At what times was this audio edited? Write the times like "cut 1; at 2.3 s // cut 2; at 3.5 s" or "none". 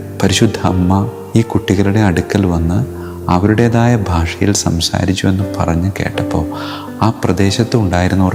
none